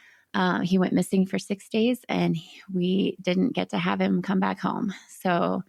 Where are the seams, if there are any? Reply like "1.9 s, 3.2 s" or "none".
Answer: none